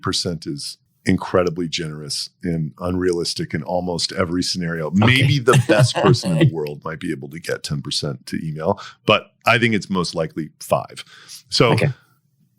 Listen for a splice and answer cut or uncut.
cut